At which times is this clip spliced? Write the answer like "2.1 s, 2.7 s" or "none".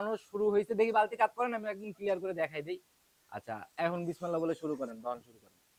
none